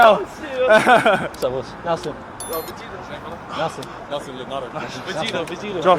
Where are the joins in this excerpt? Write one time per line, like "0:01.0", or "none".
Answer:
0:01.3